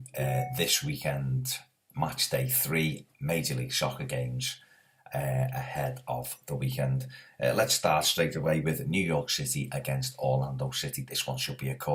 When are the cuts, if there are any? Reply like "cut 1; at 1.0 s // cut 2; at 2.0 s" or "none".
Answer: none